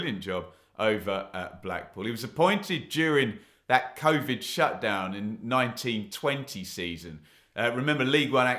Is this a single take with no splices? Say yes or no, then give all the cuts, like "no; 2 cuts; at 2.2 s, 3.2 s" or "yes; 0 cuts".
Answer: yes; 0 cuts